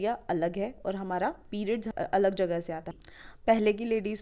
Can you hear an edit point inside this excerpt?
yes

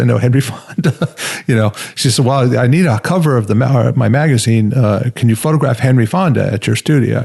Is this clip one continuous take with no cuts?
yes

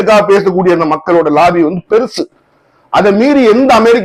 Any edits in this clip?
no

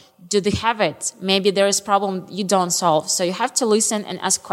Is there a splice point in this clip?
no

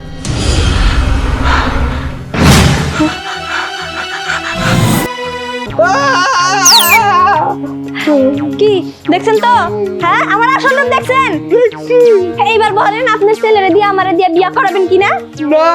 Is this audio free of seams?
no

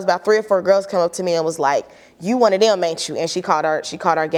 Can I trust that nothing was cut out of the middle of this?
yes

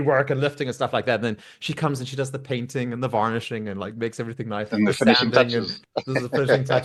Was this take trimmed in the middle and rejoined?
no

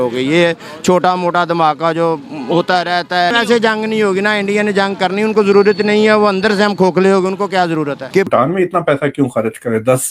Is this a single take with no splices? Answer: no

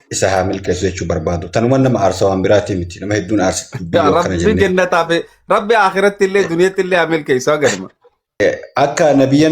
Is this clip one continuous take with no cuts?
no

